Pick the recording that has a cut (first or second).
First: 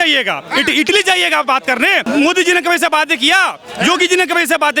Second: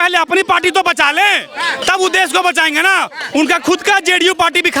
first